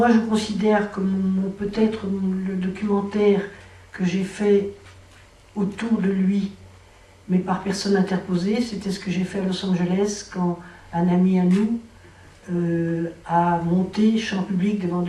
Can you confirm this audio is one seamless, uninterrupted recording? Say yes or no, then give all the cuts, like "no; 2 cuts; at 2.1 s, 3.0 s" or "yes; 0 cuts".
no; 1 cut; at 14.1 s